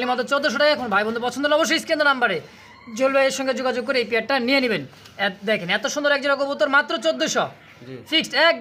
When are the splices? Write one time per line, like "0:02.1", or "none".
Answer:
none